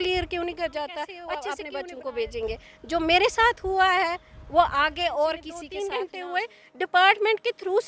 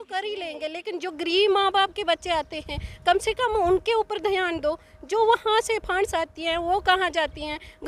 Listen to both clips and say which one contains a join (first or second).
first